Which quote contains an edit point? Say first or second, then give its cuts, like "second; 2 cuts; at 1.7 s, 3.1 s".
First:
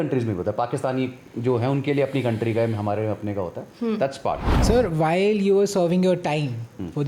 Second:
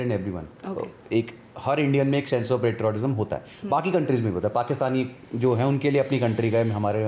first; 1 cut; at 4.5 s